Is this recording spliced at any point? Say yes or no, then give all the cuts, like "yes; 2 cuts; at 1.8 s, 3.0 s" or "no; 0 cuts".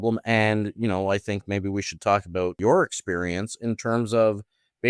yes; 1 cut; at 2.6 s